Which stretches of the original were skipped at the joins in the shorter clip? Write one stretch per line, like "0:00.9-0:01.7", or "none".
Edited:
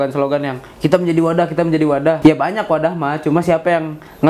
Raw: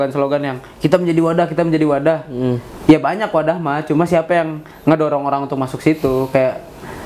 0:02.2-0:02.8